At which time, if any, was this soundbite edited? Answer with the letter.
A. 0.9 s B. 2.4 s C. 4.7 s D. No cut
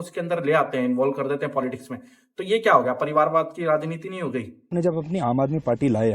C